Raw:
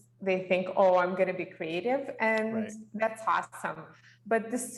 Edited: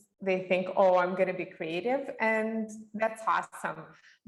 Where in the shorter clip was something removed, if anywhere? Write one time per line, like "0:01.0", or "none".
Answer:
none